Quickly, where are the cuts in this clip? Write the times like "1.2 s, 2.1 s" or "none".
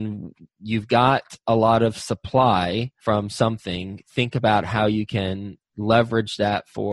2.9 s